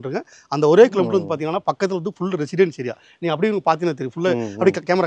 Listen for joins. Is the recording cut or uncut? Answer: uncut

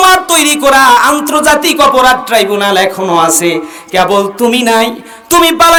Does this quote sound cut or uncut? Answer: uncut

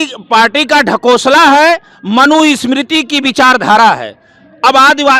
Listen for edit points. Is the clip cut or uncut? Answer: uncut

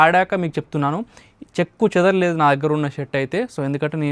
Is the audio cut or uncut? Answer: uncut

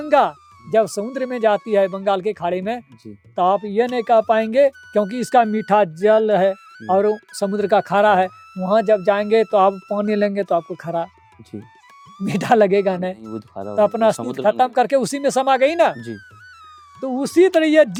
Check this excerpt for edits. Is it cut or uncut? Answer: uncut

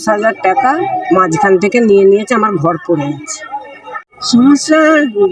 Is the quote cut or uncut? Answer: uncut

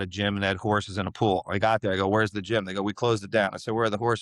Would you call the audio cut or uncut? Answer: uncut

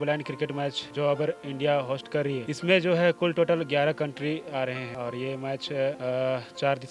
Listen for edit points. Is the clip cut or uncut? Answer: cut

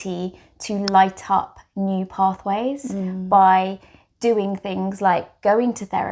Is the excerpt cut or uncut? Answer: uncut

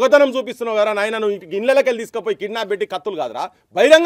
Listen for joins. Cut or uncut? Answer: uncut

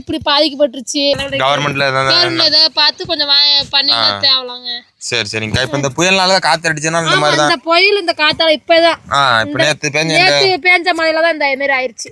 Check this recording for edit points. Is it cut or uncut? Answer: uncut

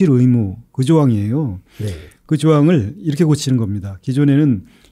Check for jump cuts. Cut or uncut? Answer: uncut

